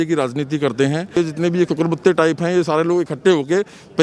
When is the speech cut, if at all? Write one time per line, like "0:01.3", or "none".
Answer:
0:01.2